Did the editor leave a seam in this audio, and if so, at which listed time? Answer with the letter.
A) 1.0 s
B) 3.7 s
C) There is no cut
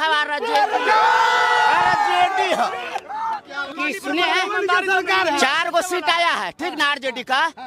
B